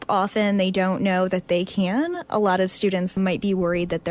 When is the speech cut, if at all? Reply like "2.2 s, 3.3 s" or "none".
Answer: 3.1 s